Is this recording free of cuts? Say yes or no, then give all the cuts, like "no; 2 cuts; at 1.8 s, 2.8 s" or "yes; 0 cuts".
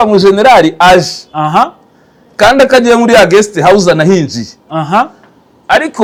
yes; 0 cuts